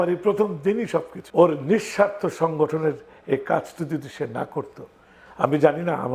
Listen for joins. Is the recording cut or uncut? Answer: cut